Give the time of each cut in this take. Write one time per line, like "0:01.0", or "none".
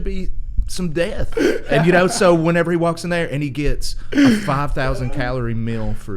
none